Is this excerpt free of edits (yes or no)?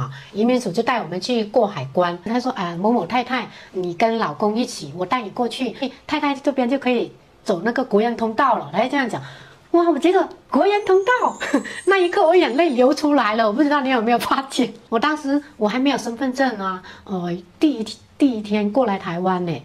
no